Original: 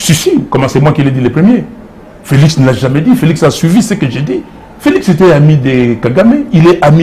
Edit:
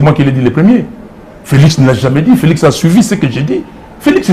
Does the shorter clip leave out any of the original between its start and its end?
no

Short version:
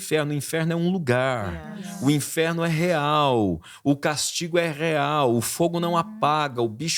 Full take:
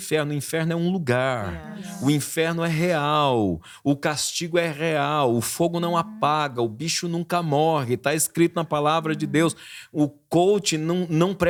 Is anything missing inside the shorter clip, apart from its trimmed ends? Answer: no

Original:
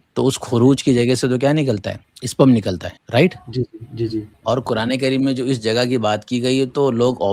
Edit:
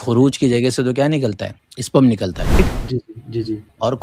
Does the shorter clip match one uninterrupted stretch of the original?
no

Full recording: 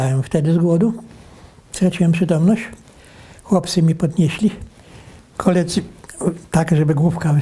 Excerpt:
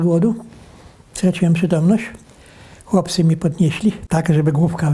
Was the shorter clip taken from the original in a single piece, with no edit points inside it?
no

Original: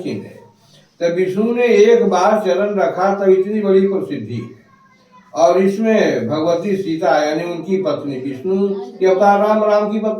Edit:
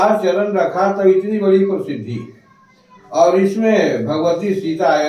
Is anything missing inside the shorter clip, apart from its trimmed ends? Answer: no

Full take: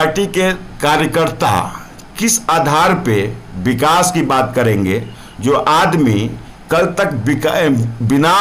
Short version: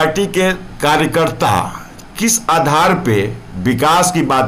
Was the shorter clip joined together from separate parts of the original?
no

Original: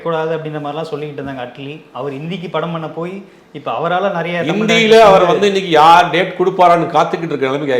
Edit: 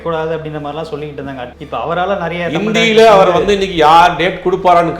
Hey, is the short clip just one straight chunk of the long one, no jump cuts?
no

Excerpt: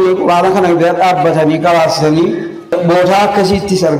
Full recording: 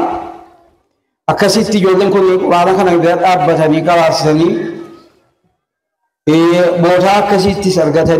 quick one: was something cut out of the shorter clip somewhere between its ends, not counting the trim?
yes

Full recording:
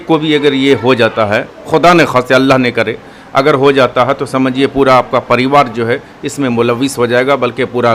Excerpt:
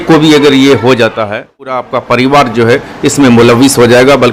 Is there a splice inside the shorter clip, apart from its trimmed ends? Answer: yes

